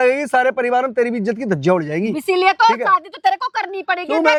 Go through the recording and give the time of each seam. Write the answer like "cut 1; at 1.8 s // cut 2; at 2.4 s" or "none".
none